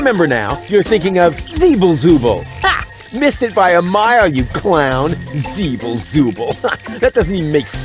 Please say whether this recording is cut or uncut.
cut